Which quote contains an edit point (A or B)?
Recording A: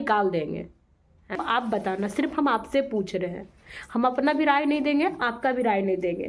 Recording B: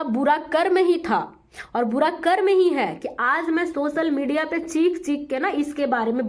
A